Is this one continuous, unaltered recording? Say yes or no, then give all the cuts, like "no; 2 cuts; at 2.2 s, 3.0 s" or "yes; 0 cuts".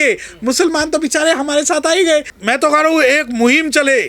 no; 1 cut; at 2.3 s